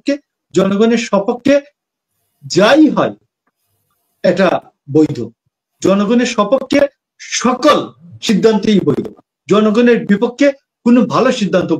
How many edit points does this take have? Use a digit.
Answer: 0